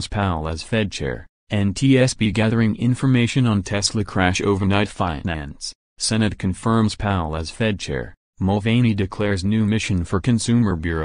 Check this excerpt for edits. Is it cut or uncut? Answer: uncut